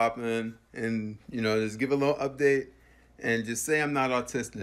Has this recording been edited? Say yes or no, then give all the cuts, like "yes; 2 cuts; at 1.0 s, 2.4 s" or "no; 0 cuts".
no; 0 cuts